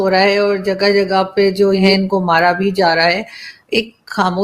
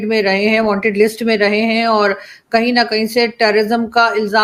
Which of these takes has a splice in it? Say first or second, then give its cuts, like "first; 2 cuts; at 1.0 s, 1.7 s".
first; 1 cut; at 1.9 s